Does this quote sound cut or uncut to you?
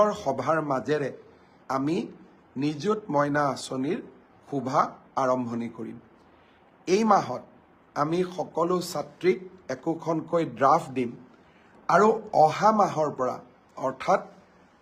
uncut